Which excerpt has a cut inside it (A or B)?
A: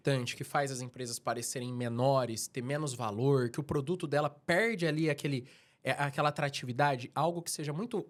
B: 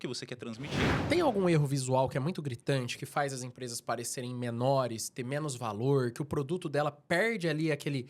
B